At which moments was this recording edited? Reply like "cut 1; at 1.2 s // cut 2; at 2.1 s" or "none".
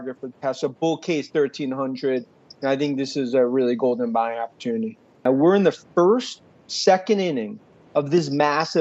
cut 1; at 5.2 s